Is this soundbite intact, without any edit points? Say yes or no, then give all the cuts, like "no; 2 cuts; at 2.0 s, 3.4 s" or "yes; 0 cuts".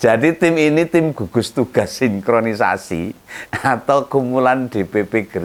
yes; 0 cuts